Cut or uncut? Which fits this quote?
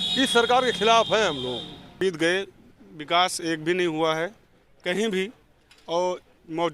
cut